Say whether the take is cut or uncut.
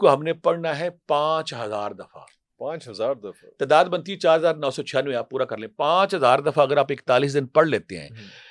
uncut